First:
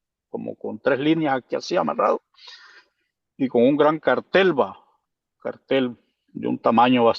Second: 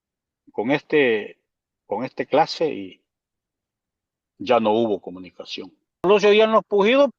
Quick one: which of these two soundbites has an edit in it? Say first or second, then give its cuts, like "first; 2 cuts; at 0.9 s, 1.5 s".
second; 1 cut; at 6.1 s